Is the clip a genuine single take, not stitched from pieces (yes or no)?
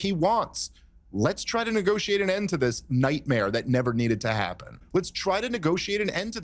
no